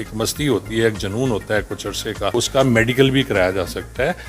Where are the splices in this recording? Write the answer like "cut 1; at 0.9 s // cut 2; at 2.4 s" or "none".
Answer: cut 1; at 2.3 s